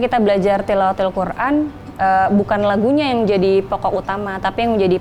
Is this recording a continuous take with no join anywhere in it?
yes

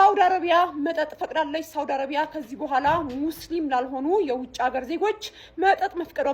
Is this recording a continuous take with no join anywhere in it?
yes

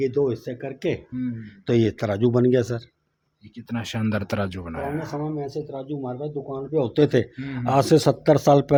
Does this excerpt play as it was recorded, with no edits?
yes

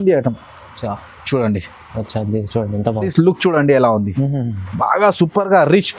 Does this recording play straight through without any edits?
no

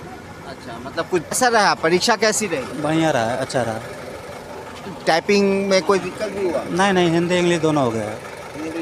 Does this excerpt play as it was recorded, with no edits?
no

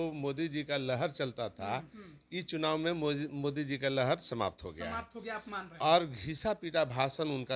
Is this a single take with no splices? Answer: yes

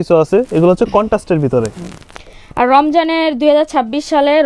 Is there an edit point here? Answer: no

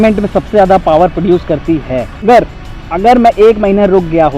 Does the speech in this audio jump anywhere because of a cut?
yes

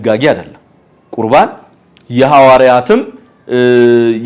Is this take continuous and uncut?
yes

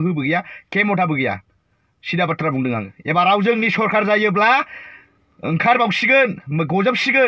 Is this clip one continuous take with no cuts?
no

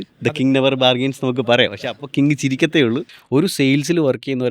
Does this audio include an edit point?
yes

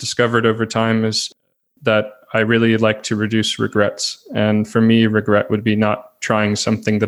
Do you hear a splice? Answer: no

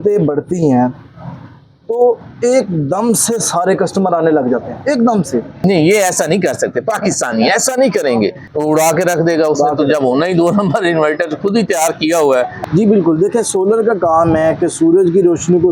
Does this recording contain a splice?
yes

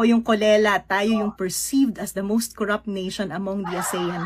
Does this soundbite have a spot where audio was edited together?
yes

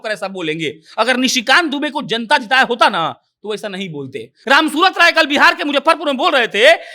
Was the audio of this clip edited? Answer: yes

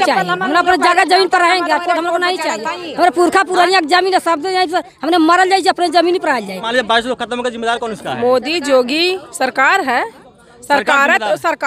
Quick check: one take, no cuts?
no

